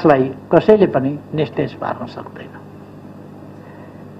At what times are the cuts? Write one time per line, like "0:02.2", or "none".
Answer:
none